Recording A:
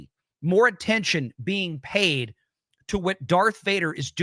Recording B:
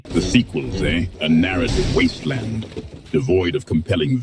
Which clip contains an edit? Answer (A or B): B